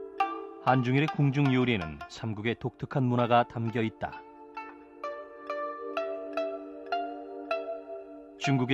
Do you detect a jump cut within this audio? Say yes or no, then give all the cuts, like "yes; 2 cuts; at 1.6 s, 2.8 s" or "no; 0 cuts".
yes; 1 cut; at 4.0 s